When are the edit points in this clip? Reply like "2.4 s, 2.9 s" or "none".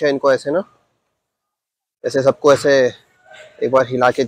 none